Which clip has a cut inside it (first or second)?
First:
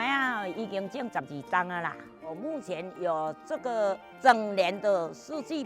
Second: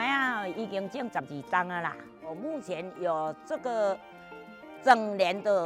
first